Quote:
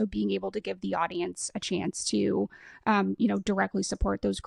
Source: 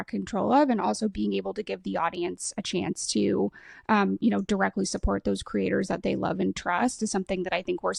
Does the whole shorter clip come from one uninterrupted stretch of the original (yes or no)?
yes